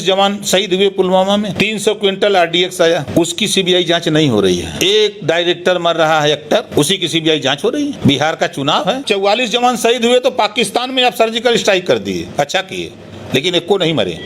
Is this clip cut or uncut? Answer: cut